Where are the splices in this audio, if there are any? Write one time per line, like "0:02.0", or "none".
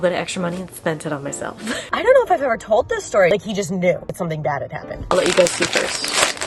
0:01.8
0:03.3
0:05.0

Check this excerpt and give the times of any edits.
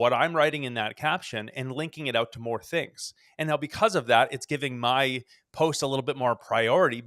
none

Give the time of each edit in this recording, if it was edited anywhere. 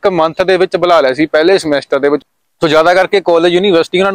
0:02.2

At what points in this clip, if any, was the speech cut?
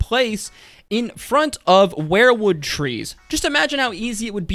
0:03.2

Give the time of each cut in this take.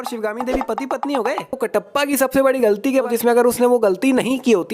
0:01.6
0:03.1

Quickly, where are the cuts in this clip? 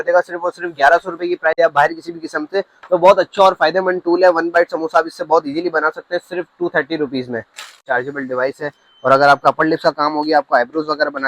0:01.6
0:07.8

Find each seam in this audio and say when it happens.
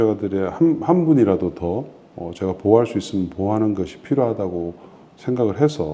none

